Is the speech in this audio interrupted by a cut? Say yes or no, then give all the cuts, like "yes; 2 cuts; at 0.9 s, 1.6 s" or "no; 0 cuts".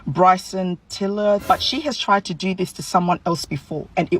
yes; 1 cut; at 1.4 s